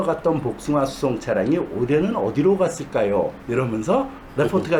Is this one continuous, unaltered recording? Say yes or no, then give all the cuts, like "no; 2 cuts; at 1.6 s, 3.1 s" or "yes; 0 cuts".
yes; 0 cuts